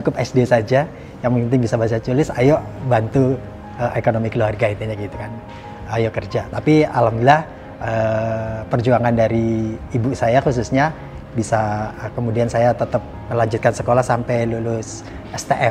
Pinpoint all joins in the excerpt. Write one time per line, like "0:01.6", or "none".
none